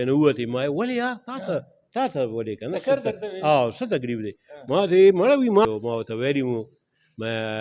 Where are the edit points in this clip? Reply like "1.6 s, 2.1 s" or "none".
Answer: 5.6 s